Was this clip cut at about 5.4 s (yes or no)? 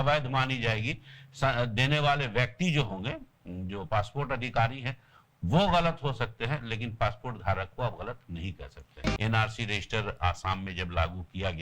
no